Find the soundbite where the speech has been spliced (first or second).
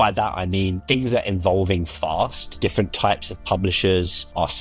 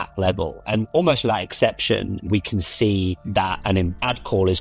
second